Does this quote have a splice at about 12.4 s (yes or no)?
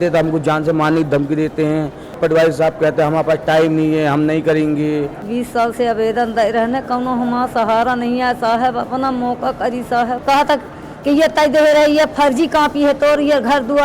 no